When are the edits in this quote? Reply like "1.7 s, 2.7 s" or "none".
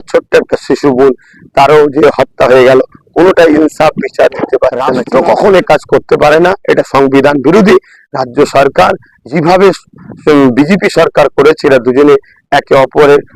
4.9 s